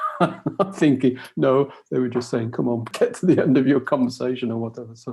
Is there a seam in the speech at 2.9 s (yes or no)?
yes